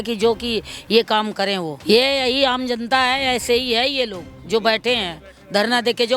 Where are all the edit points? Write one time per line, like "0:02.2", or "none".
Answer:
0:01.7